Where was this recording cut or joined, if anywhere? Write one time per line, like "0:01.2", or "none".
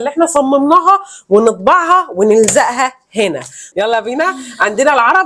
0:03.6